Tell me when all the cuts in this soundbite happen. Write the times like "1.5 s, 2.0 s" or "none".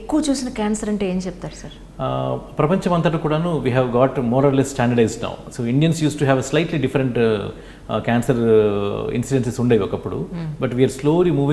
none